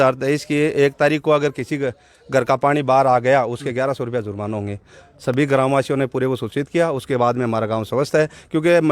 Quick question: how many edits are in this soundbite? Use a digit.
0